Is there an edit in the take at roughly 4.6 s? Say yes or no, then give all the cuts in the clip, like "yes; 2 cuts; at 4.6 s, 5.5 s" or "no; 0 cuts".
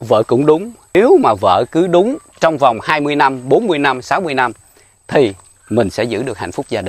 no; 1 cut; at 0.9 s